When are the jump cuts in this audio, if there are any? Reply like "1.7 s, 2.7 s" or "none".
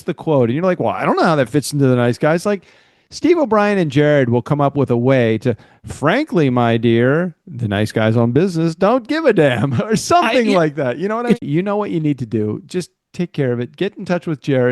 11.4 s